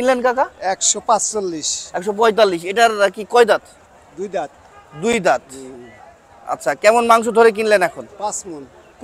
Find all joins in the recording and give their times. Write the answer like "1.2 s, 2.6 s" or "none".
none

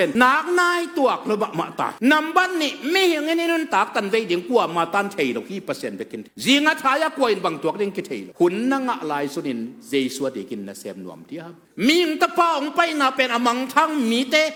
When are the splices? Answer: none

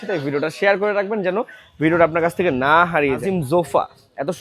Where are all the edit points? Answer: 3.2 s

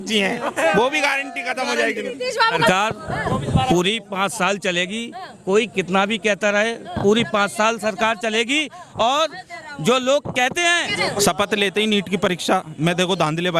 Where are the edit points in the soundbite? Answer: 2.7 s, 10.9 s

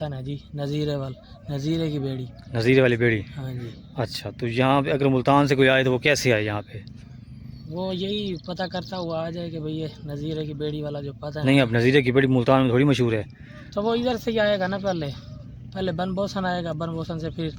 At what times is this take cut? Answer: none

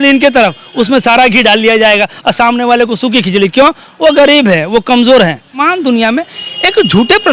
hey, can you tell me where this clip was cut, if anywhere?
5.6 s

